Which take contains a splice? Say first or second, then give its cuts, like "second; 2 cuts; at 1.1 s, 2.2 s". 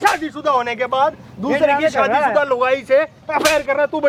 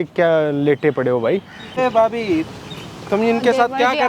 second; 1 cut; at 1.8 s